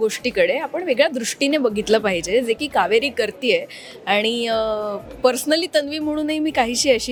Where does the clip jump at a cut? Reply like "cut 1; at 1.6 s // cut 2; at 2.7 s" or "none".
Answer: none